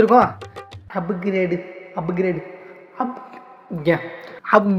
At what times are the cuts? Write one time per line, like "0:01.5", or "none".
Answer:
none